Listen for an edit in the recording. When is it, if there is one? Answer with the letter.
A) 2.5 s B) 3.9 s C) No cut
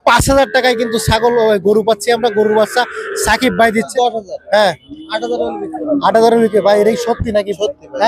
B